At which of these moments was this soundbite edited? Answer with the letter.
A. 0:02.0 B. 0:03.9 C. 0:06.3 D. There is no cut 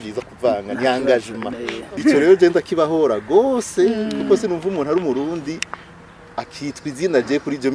A